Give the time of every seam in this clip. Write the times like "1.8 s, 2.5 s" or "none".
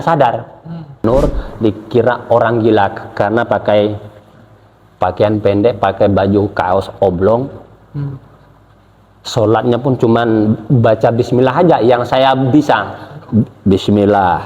1.0 s